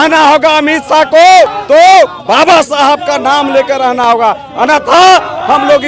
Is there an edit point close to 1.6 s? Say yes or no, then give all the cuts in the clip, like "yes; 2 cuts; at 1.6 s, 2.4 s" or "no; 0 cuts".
yes; 1 cut; at 1.6 s